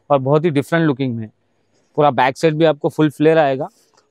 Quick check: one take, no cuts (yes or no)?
yes